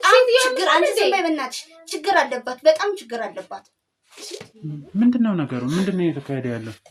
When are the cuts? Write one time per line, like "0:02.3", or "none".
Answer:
none